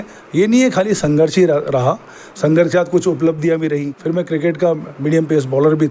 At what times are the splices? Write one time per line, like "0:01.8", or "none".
0:03.9